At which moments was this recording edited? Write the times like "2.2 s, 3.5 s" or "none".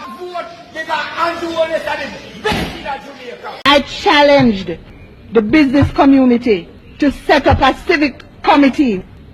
3.5 s